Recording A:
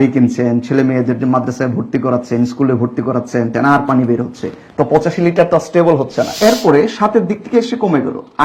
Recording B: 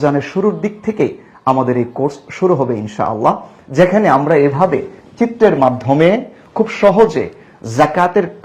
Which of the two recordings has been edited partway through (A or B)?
A